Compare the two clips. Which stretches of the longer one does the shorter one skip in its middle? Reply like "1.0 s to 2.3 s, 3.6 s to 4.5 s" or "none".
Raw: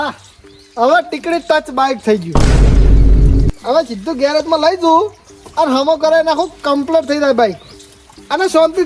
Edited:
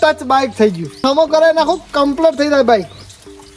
2.5 s to 5.7 s